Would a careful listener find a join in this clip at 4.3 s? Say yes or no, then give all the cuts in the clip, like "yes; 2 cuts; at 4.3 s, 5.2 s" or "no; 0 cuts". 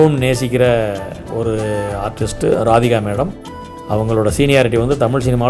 no; 1 cut; at 1.2 s